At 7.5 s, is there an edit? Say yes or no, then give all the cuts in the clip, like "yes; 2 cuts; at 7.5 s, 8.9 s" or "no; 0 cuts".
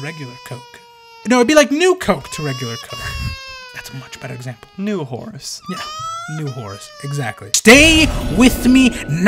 yes; 1 cut; at 7.5 s